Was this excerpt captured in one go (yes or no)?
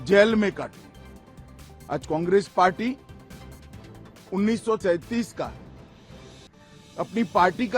no